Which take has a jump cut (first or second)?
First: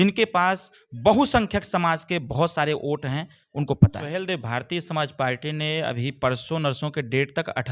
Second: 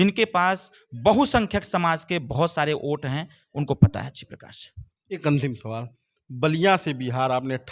first